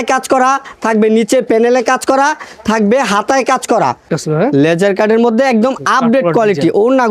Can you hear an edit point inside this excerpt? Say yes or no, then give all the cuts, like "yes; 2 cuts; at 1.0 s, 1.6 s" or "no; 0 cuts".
yes; 1 cut; at 4.1 s